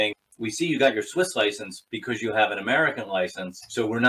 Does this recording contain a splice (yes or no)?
no